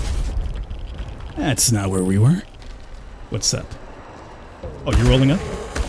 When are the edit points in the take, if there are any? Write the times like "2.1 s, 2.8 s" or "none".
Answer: 2.7 s